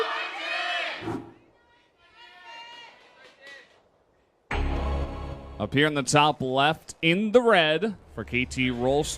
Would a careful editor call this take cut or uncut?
cut